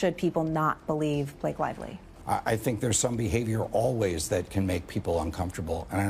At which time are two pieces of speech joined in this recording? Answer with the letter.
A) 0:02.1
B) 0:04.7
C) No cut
A